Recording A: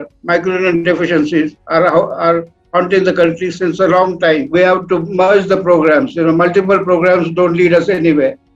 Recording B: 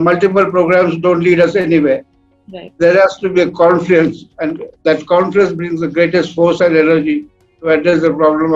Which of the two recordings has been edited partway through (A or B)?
A